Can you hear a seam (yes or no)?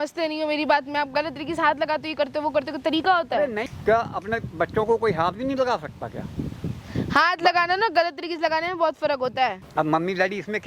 yes